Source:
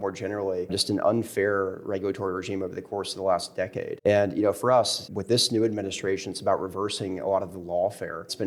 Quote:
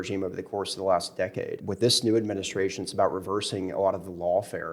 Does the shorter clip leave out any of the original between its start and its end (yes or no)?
yes